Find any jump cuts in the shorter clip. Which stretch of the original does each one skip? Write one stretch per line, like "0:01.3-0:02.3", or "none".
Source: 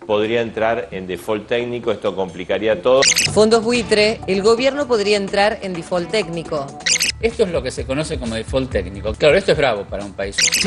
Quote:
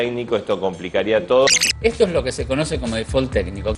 0:03.2-0:07.0